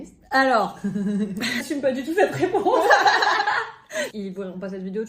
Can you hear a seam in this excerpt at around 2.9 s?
no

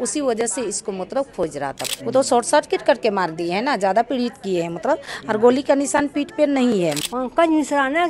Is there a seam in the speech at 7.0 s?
yes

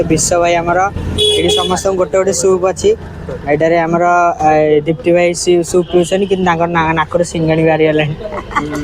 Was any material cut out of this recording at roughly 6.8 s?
no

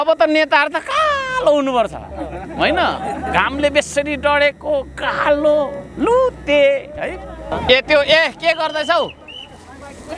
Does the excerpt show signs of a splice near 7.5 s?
yes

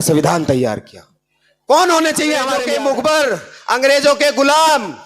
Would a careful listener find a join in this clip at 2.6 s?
yes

